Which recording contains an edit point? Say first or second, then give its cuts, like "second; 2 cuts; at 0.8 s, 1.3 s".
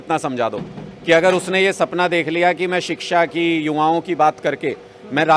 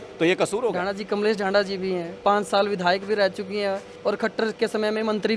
second; 3 cuts; at 0.8 s, 2.1 s, 3.9 s